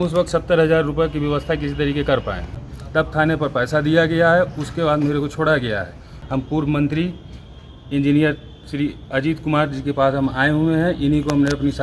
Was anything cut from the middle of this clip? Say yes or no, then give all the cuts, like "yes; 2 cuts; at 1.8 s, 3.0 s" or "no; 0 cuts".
yes; 2 cuts; at 2.6 s, 6.1 s